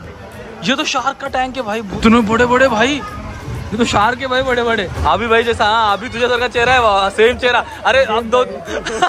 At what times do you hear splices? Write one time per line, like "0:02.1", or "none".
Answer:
0:01.9
0:04.9